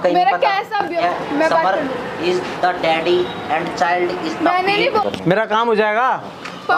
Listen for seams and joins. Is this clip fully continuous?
no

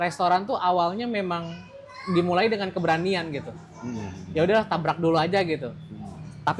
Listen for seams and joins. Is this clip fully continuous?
yes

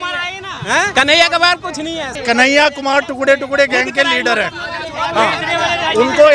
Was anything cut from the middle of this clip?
yes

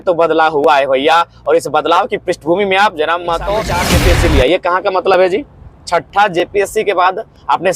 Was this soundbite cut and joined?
yes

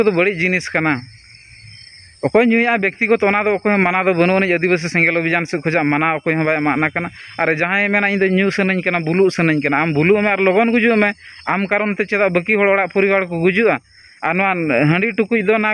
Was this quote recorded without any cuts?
yes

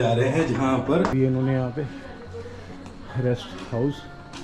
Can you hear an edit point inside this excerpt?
yes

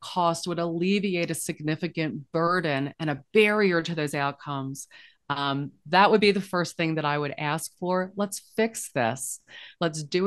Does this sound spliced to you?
no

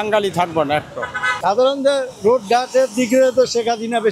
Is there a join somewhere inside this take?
yes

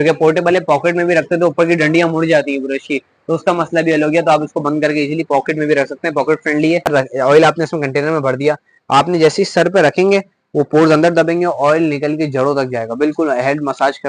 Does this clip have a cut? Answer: yes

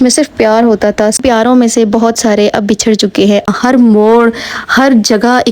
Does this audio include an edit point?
yes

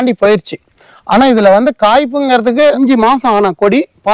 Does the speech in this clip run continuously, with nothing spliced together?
no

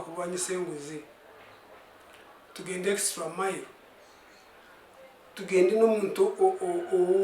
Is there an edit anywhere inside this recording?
no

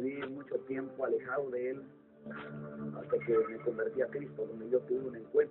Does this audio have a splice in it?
no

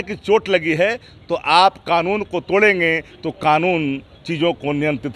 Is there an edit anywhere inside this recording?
no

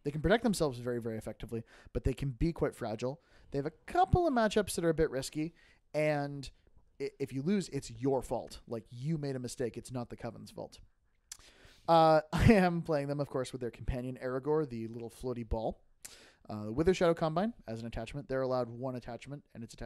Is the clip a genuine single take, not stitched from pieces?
yes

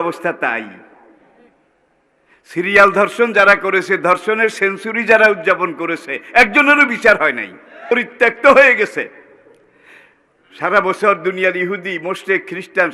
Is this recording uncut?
no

